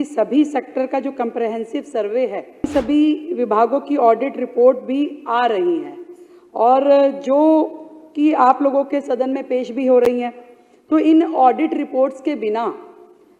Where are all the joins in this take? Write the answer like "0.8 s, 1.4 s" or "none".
2.7 s